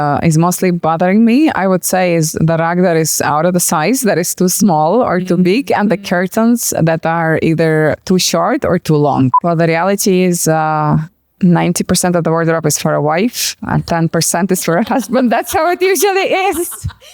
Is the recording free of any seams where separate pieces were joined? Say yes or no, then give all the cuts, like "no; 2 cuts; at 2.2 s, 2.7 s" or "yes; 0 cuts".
no; 2 cuts; at 2.3 s, 9.4 s